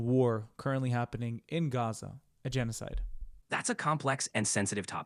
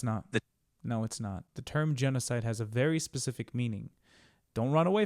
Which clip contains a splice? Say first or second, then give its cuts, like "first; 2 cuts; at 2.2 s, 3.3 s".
second; 1 cut; at 1.5 s